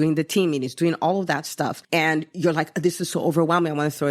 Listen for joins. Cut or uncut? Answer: cut